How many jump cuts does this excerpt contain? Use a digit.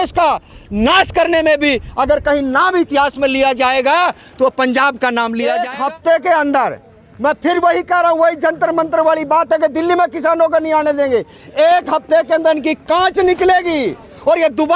1